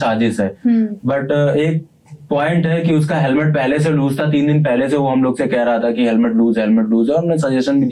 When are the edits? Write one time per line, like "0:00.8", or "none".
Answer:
none